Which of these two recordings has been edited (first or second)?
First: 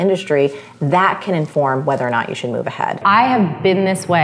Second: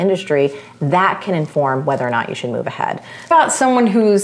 first